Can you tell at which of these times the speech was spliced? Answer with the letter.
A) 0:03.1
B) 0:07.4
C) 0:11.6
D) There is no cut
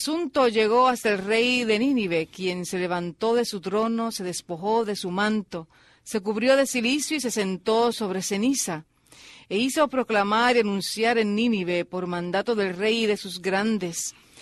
D